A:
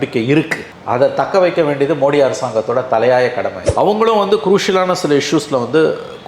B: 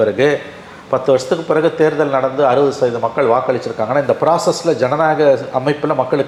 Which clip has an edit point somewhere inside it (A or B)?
A